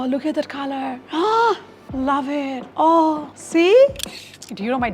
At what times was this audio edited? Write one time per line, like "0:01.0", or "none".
0:04.0